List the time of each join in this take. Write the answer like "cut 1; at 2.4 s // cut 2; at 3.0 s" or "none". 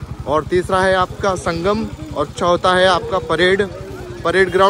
none